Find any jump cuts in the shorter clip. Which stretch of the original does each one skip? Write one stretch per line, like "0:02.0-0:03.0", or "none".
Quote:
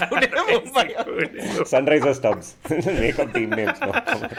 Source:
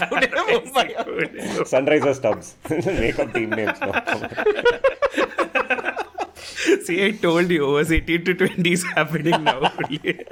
none